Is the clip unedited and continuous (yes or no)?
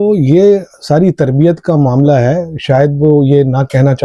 yes